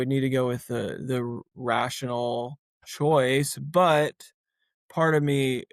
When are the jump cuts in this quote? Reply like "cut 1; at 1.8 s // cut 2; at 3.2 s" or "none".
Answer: none